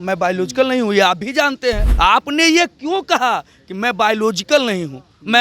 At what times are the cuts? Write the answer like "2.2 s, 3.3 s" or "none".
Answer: 1.9 s